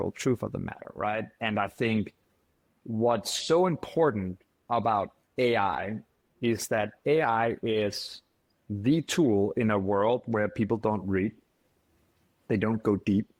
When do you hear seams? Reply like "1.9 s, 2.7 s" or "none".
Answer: none